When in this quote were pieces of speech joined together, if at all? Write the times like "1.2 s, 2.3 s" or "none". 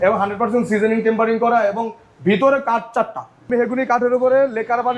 3.5 s